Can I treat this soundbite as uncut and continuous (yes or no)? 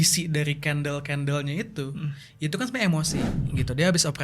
no